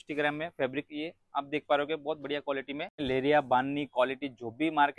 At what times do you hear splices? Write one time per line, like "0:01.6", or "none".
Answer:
0:02.9